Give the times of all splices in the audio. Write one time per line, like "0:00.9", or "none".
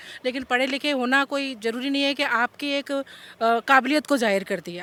none